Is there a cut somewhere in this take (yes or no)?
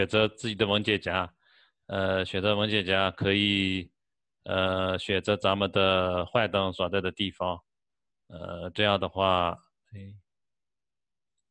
no